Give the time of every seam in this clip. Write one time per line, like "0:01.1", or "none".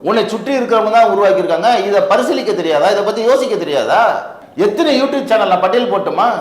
0:04.4